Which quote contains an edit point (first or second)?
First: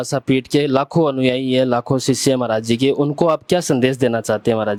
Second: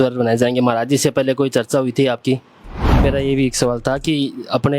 second